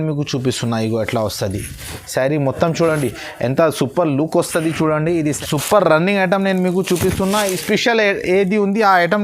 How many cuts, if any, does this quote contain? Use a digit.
1